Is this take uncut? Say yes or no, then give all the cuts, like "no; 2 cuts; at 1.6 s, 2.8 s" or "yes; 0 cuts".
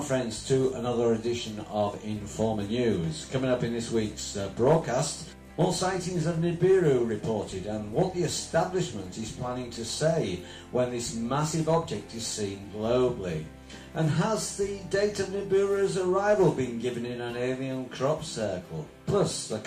no; 1 cut; at 1.4 s